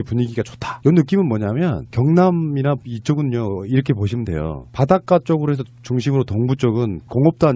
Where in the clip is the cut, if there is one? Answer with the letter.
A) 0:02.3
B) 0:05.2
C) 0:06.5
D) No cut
C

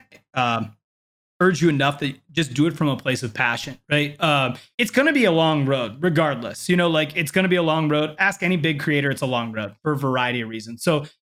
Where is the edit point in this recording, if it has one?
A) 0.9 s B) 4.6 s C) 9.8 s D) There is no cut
B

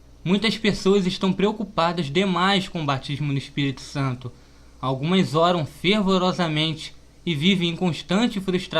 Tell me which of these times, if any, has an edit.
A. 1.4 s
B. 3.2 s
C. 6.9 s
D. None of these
C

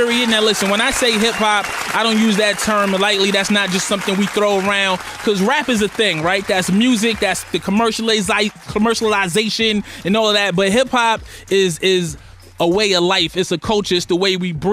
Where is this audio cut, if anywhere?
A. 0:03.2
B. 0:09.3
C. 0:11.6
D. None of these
A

